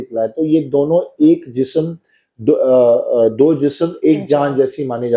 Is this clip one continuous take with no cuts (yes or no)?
yes